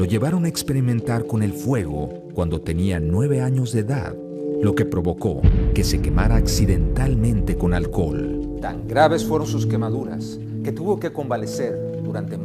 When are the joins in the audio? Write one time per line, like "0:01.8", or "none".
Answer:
0:02.0